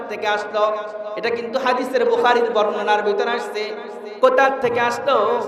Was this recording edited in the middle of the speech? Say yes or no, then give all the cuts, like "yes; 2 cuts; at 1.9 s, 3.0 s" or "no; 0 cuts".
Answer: no; 0 cuts